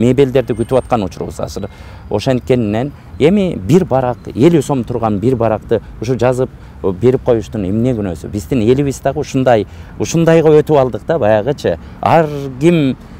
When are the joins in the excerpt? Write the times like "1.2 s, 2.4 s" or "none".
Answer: none